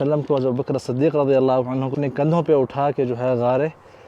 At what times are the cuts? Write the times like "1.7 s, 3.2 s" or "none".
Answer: 1.9 s